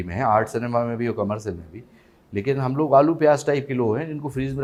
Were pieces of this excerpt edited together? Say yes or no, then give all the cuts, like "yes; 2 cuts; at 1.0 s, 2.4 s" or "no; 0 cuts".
no; 0 cuts